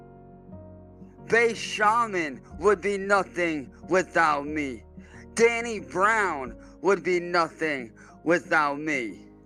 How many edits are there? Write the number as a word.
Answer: one